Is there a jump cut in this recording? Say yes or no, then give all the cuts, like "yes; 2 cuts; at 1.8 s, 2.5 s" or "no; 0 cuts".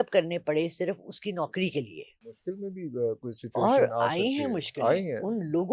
yes; 1 cut; at 2.2 s